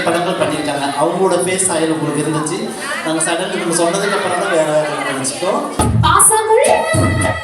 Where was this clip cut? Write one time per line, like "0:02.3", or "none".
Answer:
0:05.7